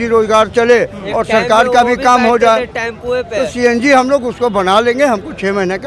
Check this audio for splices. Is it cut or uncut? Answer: uncut